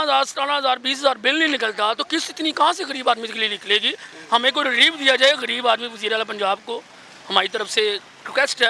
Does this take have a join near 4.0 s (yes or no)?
no